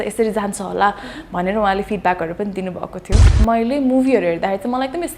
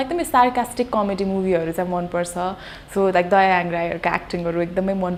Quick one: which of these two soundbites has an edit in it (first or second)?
first